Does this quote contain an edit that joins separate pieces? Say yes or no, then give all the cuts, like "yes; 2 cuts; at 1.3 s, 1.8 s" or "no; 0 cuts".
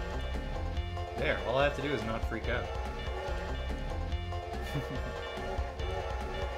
no; 0 cuts